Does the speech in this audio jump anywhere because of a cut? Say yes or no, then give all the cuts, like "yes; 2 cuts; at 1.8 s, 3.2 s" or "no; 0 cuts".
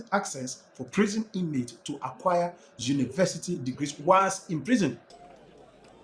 no; 0 cuts